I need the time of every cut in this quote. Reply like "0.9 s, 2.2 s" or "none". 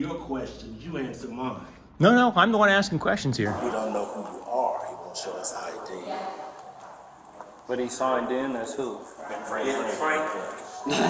3.5 s